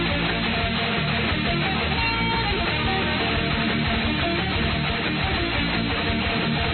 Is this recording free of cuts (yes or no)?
yes